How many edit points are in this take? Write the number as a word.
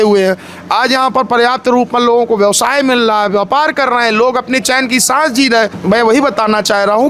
one